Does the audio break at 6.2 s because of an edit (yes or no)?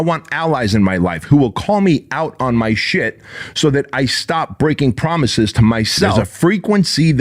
yes